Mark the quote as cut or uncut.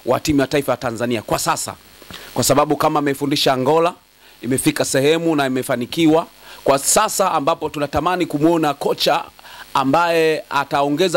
uncut